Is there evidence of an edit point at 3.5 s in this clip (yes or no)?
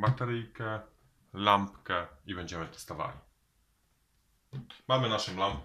no